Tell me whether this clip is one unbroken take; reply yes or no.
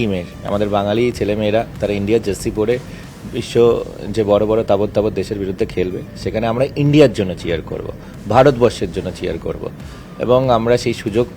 yes